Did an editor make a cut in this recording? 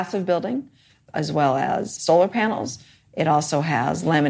yes; 2 cuts; at 1.0 s, 1.9 s

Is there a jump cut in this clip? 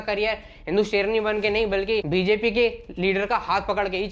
no; 0 cuts

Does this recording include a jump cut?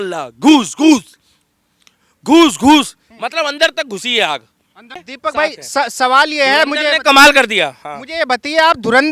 yes; 1 cut; at 5.1 s

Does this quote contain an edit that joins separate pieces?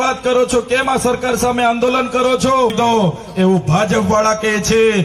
yes; 1 cut; at 2.7 s

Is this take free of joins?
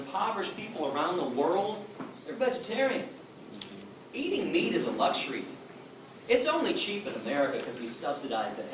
yes; 0 cuts

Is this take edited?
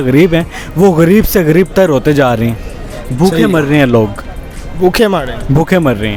no; 0 cuts

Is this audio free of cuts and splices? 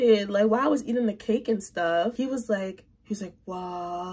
no; 1 cut; at 2.1 s

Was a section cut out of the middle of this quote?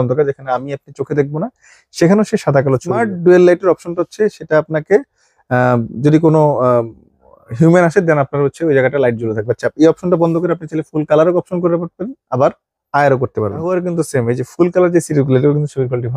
yes; 2 cuts; at 3.0 s, 13.7 s

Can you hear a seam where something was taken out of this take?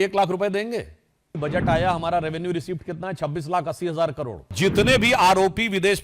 yes; 2 cuts; at 1.4 s, 4.5 s

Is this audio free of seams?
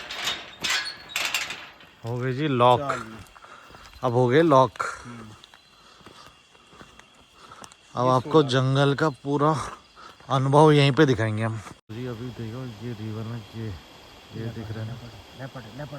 no; 1 cut; at 11.8 s

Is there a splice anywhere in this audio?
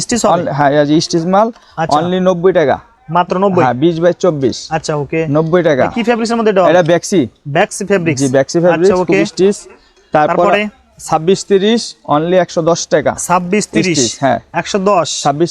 no; 0 cuts

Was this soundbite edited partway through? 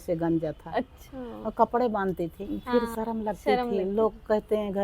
yes; 1 cut; at 2.5 s

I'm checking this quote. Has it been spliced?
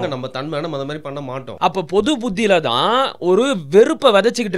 yes; 1 cut; at 1.4 s

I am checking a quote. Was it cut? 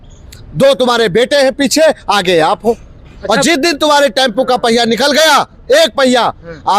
no; 0 cuts

